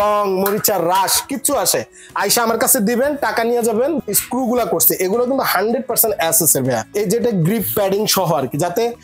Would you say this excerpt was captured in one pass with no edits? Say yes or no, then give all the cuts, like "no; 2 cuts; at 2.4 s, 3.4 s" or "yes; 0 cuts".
no; 2 cuts; at 4.0 s, 6.9 s